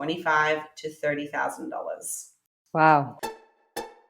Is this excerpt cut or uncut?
cut